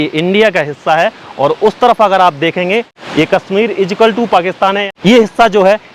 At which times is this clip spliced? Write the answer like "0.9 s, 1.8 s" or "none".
2.9 s, 4.8 s